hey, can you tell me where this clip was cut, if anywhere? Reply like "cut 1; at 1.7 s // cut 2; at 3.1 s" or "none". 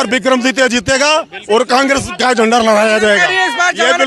none